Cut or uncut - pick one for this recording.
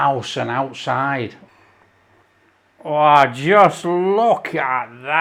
uncut